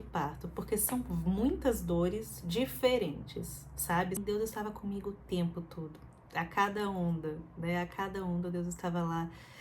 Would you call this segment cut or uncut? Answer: cut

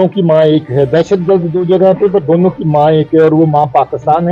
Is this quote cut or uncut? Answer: uncut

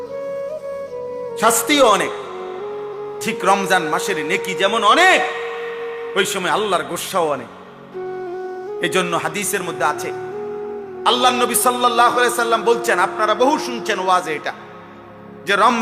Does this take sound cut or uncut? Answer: cut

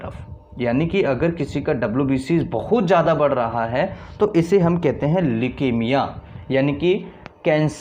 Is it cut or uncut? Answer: uncut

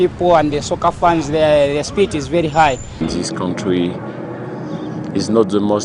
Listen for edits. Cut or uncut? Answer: cut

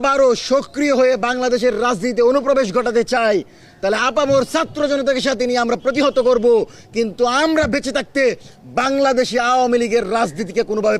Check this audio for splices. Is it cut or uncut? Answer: uncut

